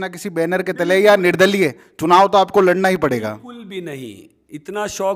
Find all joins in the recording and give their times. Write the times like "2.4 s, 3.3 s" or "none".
none